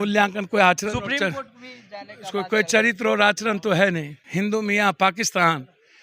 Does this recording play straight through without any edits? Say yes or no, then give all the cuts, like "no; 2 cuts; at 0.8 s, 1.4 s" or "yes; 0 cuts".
no; 1 cut; at 4.2 s